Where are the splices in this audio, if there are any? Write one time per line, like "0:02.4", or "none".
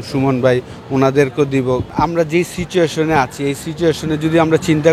0:01.9